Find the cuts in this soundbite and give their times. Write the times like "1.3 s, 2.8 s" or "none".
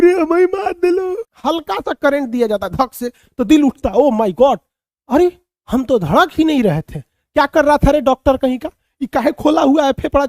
1.3 s